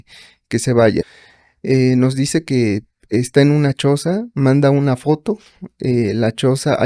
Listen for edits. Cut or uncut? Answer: cut